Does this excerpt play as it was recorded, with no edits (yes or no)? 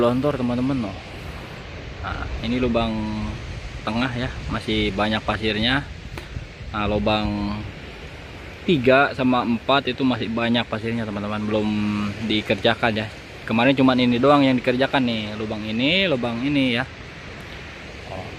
yes